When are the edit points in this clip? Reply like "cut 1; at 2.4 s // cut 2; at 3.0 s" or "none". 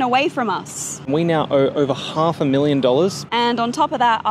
cut 1; at 1.0 s // cut 2; at 3.2 s